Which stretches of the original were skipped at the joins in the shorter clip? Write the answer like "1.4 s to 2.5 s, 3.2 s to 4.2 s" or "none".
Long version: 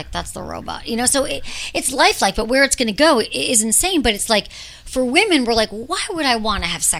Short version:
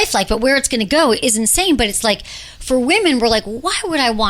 3.3 s to 3.5 s